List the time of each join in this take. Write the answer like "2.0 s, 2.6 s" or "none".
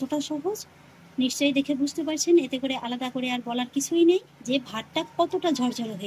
4.3 s